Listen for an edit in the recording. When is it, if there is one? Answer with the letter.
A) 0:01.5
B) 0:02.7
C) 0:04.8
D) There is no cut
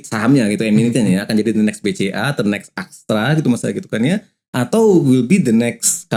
D